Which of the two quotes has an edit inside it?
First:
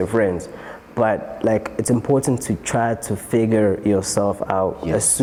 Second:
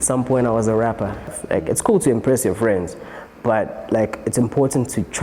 second; 1 cut; at 1.4 s

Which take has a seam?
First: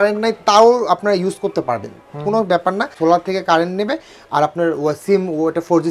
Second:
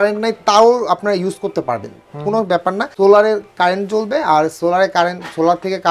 first; 1 cut; at 2.9 s

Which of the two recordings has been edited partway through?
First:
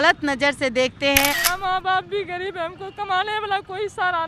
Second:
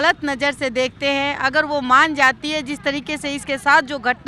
first; 1 cut; at 1.4 s

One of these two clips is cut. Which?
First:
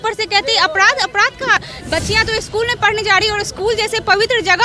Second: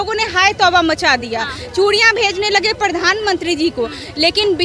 first; 1 cut; at 1.6 s

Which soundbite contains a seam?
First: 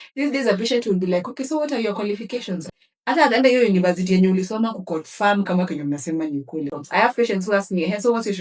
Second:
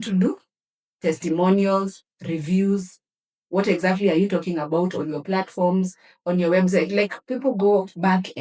first; 2 cuts; at 2.7 s, 6.7 s

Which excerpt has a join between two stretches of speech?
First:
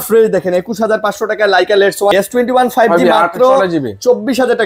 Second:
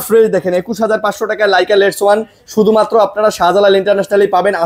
first; 1 cut; at 2.1 s

